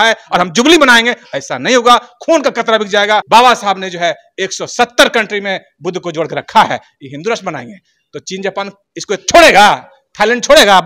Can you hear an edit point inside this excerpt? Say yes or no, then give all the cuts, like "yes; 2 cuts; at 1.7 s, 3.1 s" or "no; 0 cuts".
yes; 1 cut; at 3.2 s